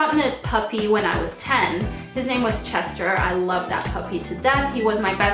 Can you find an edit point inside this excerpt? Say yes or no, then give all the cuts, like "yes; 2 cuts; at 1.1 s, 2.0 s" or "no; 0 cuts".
yes; 1 cut; at 2.2 s